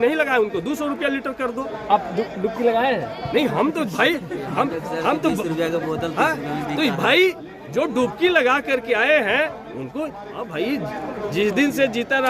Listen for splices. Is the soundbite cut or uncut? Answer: uncut